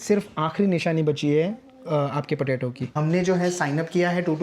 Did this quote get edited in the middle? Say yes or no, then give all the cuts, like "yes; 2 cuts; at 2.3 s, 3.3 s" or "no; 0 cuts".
yes; 1 cut; at 2.9 s